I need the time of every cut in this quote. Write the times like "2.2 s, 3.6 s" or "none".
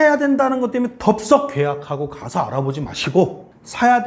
none